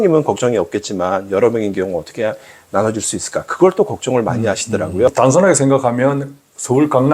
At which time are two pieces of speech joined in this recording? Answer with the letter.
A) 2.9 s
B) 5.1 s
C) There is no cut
B